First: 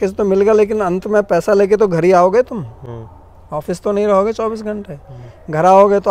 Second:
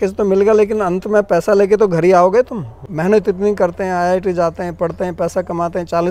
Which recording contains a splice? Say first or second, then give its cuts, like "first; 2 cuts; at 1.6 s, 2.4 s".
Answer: second; 1 cut; at 2.8 s